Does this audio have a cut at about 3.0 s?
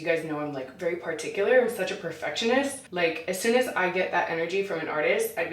no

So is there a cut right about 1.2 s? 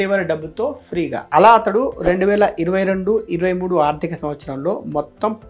no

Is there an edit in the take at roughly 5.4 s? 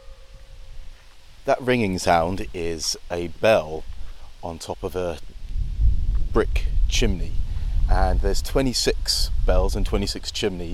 no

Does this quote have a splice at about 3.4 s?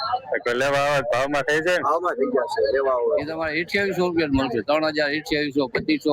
yes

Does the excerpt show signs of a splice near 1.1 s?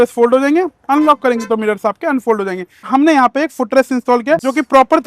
no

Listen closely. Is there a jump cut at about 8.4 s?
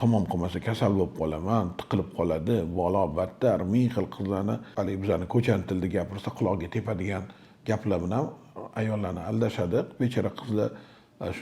no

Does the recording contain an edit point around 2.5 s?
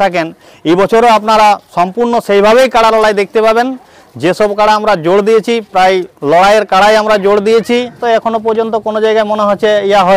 no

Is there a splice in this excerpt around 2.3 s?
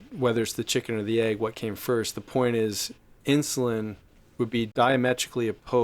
no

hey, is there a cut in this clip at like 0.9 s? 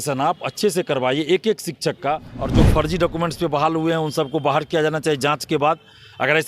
no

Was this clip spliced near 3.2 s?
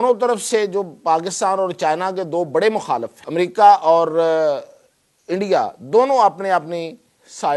yes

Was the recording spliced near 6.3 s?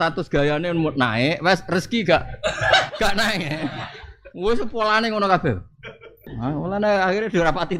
yes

